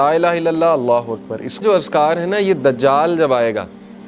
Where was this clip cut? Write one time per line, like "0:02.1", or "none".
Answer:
0:01.6